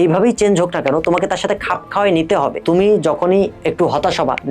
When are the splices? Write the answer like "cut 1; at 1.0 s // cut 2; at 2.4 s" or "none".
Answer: cut 1; at 2.6 s // cut 2; at 3.6 s